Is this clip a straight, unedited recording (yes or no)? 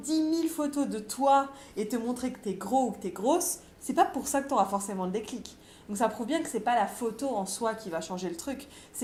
yes